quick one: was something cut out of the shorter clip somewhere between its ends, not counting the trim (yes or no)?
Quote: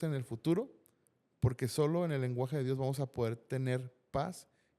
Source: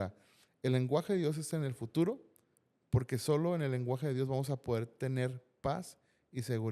no